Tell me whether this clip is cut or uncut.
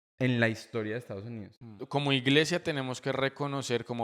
cut